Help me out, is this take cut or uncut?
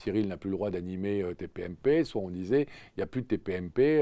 uncut